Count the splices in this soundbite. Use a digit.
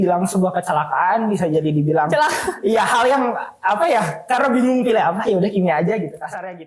0